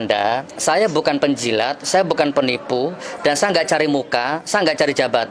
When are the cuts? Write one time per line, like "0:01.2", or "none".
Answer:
none